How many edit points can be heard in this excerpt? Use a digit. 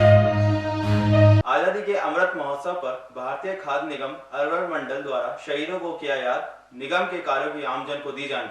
1